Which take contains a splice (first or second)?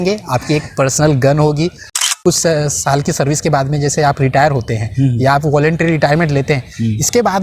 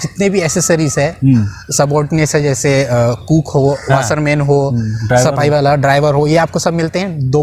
first